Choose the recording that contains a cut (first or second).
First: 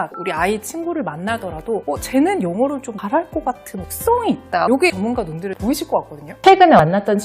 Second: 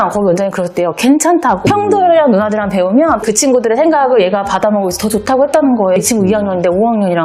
first